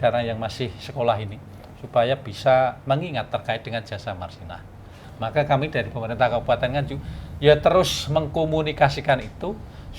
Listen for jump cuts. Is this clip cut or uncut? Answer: cut